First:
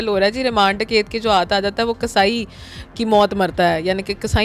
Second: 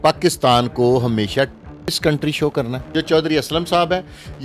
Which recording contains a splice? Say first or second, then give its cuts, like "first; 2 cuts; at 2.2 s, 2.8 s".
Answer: second; 1 cut; at 2.9 s